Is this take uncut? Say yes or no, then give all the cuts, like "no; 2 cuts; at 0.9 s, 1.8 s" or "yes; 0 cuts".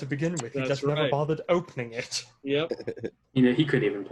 no; 1 cut; at 3.2 s